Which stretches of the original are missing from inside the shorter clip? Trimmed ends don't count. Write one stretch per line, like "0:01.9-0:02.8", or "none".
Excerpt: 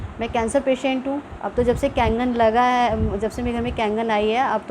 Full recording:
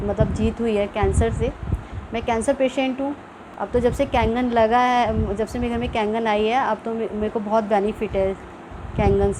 0:03.3-0:03.5